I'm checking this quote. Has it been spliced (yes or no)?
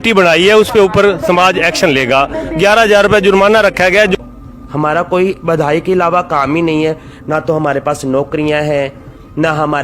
yes